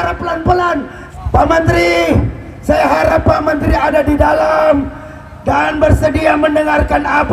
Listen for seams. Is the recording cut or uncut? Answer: cut